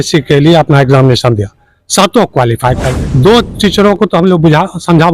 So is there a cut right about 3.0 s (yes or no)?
yes